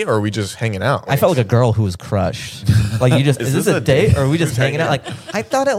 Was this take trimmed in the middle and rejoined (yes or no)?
yes